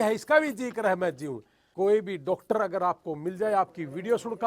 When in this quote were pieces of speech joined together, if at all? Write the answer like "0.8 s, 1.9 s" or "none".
1.7 s